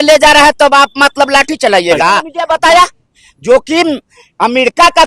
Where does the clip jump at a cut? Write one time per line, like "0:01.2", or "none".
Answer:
0:02.3